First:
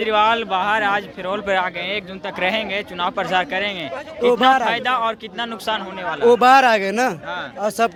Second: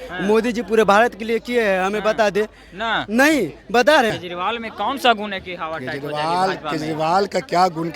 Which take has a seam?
second; 1 cut; at 4.1 s

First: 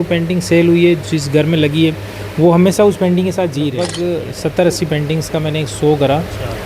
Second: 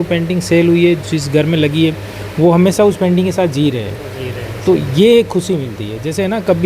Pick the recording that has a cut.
first; 1 cut; at 4.0 s

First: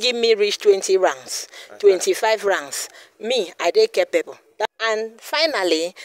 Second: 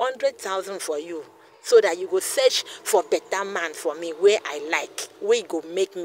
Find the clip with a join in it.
first; 1 cut; at 4.7 s

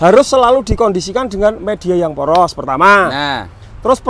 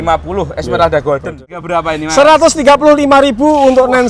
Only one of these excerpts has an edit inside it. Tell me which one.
second; 1 cut; at 1.6 s

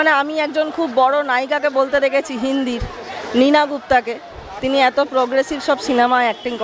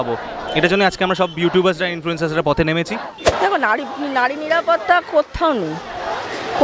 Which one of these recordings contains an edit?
second; 1 cut; at 3.3 s

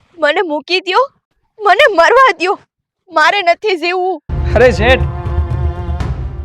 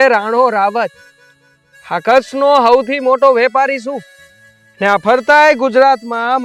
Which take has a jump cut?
first; 1 cut; at 4.3 s

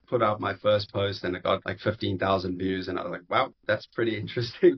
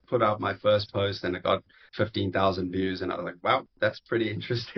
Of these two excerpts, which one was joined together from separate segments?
first; 1 cut; at 1.7 s

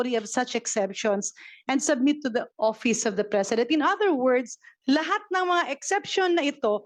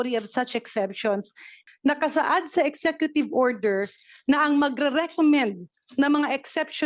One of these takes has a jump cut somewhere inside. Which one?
second; 1 cut; at 1.5 s

